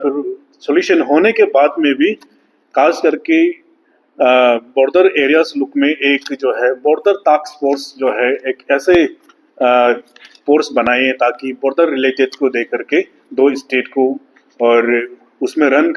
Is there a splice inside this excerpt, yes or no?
no